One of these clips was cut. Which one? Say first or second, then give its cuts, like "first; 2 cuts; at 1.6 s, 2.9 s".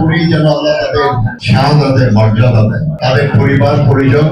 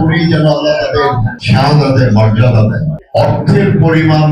second; 1 cut; at 3.0 s